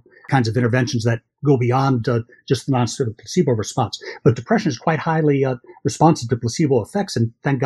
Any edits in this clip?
no; 0 cuts

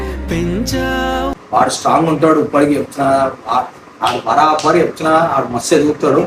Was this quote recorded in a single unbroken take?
no; 1 cut; at 1.3 s

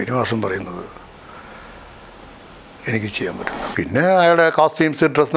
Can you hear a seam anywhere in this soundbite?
yes; 1 cut; at 3.5 s

